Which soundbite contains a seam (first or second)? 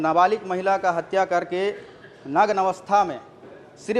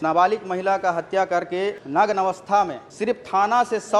second